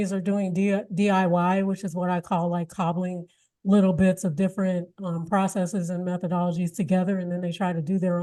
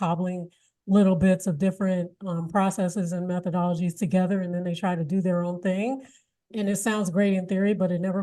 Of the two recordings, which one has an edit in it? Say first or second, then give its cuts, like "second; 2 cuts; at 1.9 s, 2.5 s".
second; 1 cut; at 6.5 s